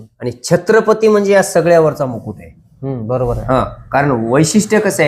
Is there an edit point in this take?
no; 0 cuts

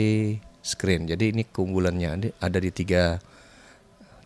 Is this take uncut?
yes; 0 cuts

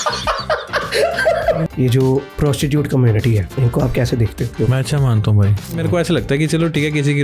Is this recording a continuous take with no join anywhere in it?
no; 5 cuts; at 1.6 s, 2.3 s, 3.5 s, 4.5 s, 5.8 s

